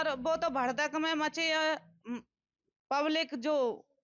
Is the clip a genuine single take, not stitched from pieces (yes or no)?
yes